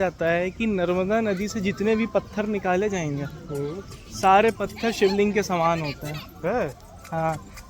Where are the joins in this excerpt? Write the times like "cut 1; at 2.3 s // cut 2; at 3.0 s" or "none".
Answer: none